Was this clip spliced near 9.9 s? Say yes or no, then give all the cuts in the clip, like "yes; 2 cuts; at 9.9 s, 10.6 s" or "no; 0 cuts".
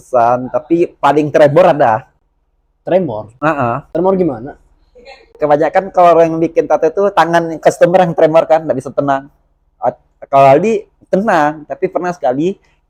no; 0 cuts